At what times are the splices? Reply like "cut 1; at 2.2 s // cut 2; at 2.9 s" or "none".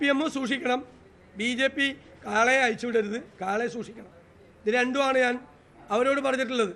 cut 1; at 2.6 s